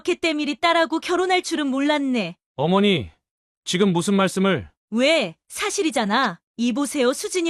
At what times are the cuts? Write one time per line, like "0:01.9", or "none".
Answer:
0:04.7

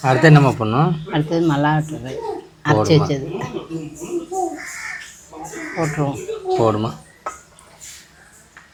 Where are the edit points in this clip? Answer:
none

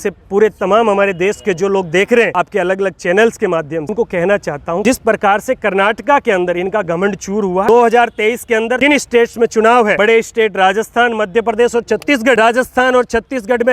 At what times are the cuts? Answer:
0:02.4
0:03.9
0:04.8
0:07.6
0:08.8
0:09.9
0:12.4

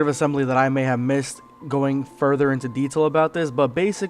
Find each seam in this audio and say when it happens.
0:03.1

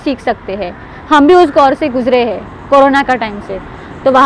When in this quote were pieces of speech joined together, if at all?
none

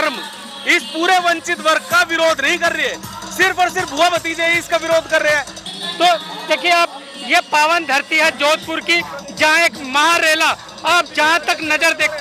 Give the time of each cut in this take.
0:05.6

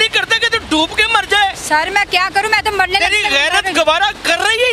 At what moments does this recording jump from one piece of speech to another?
none

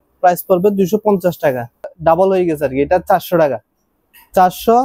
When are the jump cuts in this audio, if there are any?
0:01.9

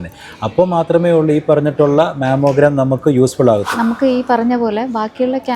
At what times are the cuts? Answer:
0:03.7

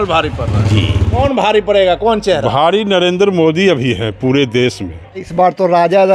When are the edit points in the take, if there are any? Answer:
0:01.2
0:05.3

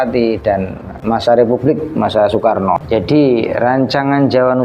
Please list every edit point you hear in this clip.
0:00.9
0:02.8

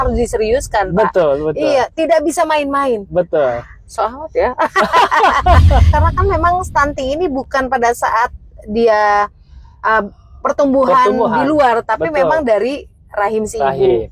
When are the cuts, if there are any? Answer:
0:05.9

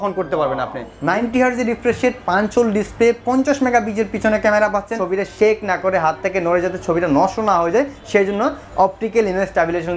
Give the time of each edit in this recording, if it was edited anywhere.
0:00.9
0:04.9

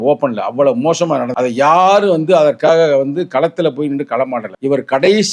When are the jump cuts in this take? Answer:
0:01.3
0:04.5

